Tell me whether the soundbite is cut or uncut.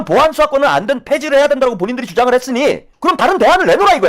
cut